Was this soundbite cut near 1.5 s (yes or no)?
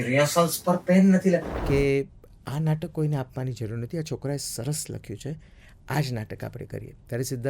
yes